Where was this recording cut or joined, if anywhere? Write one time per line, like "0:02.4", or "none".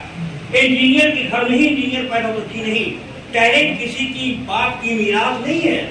none